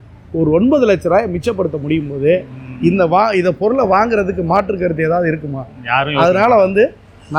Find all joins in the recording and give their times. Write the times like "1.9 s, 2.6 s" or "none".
none